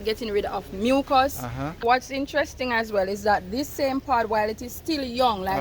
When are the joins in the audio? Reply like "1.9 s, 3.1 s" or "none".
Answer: 1.8 s